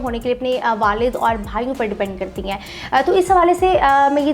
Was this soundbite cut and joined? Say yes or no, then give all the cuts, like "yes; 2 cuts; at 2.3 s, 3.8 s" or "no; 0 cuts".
no; 0 cuts